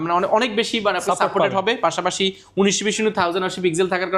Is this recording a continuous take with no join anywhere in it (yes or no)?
yes